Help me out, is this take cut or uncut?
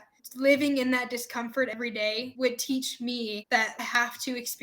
cut